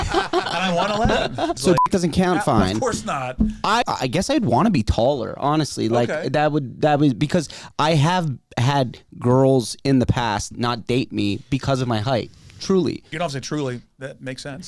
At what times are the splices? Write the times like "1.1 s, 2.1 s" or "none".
1.6 s, 3.8 s, 13.1 s